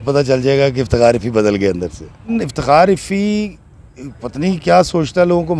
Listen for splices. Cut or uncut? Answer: cut